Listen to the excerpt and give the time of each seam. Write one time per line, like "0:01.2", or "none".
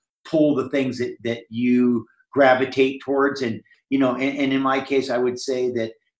0:03.7

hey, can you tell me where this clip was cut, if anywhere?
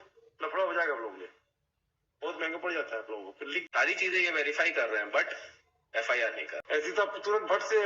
0:03.6
0:06.6

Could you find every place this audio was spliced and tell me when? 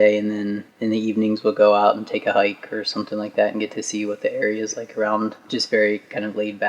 0:05.4

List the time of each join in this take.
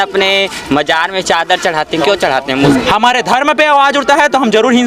0:02.7

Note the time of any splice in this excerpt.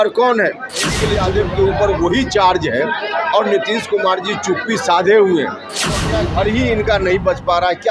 0:01.1
0:06.1

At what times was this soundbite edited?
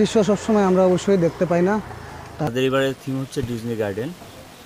0:02.5

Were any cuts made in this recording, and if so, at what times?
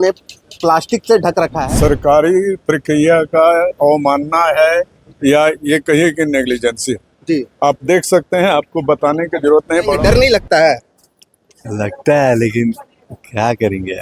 0:01.6
0:09.9

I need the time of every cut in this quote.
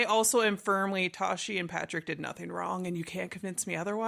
0:01.1

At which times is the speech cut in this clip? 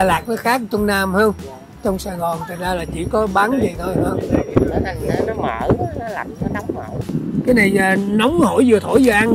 0:07.1

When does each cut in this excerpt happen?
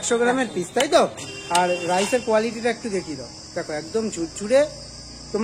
none

